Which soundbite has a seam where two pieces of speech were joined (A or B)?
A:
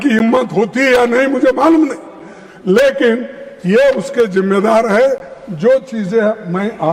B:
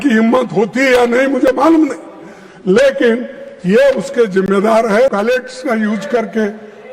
B